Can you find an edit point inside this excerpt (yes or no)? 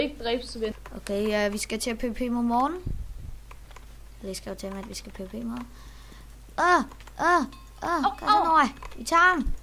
no